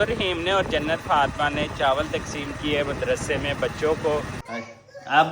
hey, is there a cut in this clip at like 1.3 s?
no; 1 cut; at 4.4 s

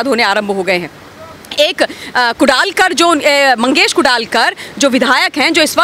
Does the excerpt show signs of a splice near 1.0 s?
no; 0 cuts

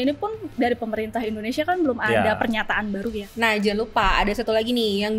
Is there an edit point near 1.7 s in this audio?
no; 1 cut; at 3.2 s

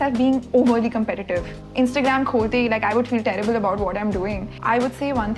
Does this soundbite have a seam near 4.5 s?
yes; 2 cuts; at 1.6 s, 4.5 s

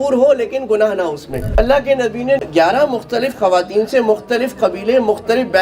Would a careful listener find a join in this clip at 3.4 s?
no; 1 cut; at 1.6 s

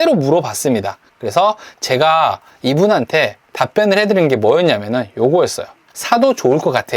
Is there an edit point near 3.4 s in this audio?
no; 1 cut; at 5.8 s

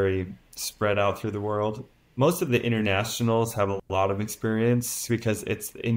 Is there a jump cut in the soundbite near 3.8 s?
no; 1 cut; at 1.8 s

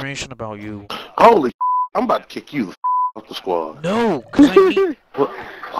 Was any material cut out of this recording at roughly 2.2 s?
no; 1 cut; at 0.9 s

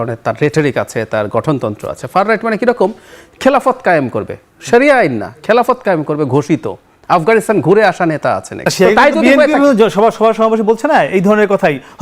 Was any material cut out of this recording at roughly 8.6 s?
yes; 1 cut; at 8.6 s

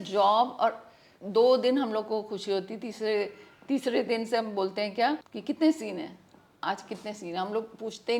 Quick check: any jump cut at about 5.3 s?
yes; 1 cut; at 5.3 s

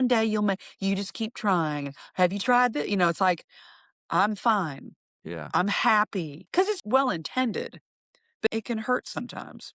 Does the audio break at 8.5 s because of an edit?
yes; 2 cuts; at 6.4 s, 8.5 s

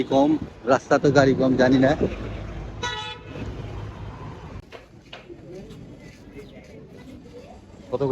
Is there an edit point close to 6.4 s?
no; 1 cut; at 4.6 s

